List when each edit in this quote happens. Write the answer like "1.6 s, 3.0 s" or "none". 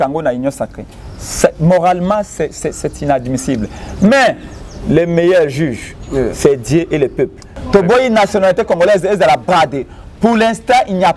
7.5 s